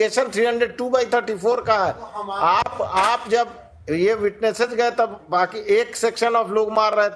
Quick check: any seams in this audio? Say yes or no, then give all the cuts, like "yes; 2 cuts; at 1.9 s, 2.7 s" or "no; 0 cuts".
no; 0 cuts